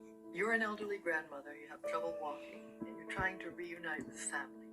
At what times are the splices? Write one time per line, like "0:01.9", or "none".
0:01.3